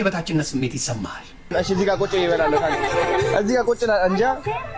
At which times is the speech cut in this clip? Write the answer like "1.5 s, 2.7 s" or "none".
1.5 s